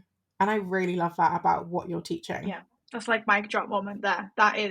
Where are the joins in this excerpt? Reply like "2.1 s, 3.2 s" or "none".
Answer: 2.7 s